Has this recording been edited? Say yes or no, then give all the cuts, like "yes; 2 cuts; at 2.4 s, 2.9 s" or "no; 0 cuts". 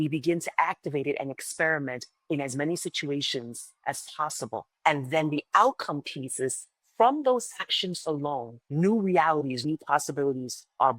yes; 3 cuts; at 4.7 s, 8.6 s, 9.6 s